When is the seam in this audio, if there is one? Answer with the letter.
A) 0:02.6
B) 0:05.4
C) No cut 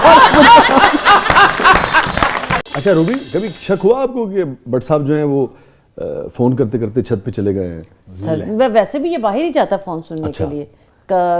A